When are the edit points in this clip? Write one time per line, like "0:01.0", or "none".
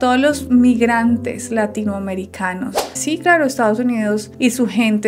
0:02.9